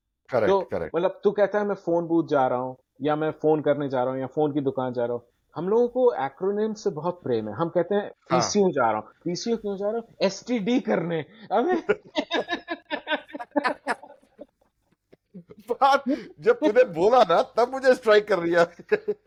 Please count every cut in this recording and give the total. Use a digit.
0